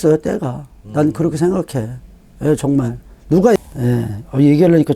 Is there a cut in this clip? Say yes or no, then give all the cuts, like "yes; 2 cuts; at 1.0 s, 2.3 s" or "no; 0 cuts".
yes; 1 cut; at 3.6 s